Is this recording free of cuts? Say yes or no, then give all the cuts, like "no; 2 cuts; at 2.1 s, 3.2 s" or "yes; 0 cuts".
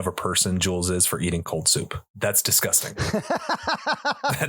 no; 1 cut; at 1.5 s